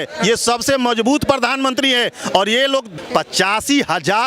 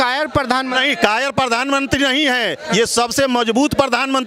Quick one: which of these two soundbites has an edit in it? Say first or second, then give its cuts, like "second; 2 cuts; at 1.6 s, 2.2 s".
first; 1 cut; at 3.0 s